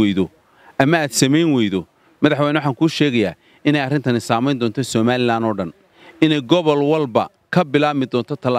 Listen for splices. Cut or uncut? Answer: uncut